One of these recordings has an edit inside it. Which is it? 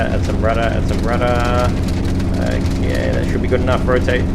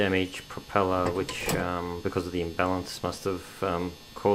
first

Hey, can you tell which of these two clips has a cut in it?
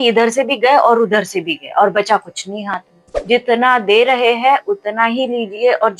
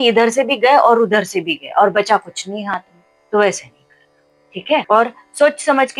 first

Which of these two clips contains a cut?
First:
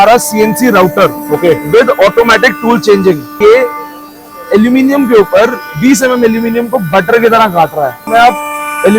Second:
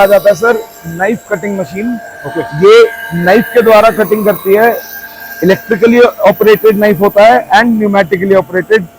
first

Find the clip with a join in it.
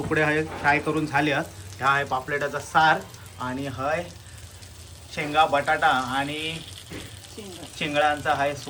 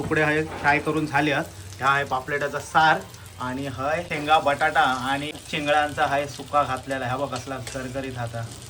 second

